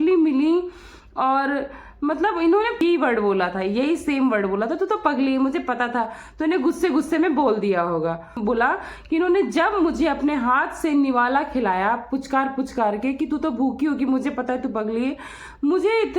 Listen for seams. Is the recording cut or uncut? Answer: cut